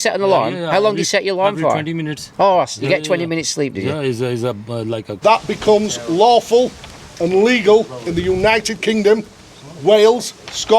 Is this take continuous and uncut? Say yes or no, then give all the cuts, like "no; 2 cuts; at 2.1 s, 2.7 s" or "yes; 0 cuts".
no; 1 cut; at 5.2 s